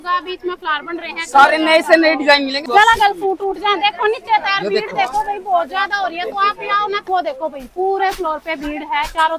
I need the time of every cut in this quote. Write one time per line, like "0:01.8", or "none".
0:02.6
0:07.0